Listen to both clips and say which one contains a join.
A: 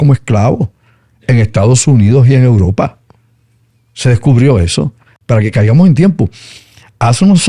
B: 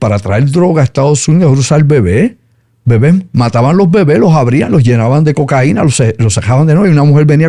A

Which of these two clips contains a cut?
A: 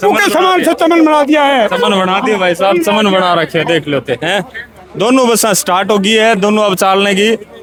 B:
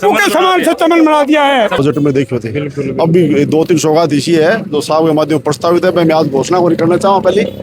B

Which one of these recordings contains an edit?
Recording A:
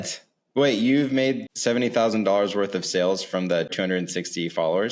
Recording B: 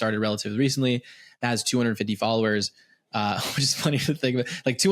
A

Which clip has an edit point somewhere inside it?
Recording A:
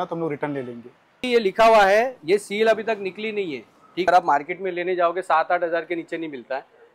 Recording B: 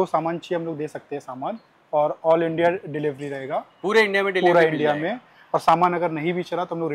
A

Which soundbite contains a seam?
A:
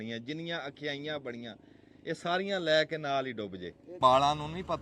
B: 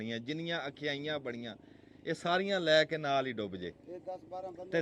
A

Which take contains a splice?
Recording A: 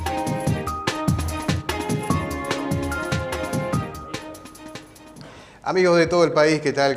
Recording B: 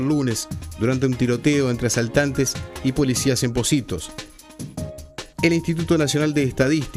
B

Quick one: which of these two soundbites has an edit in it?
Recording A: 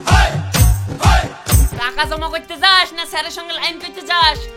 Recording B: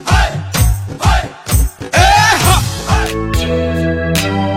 A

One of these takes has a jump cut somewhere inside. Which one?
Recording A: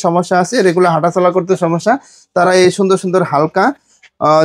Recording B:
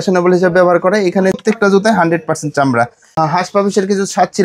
B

